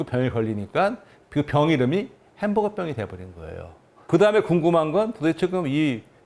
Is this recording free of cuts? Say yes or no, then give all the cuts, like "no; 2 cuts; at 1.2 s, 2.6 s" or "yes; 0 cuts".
no; 1 cut; at 4.1 s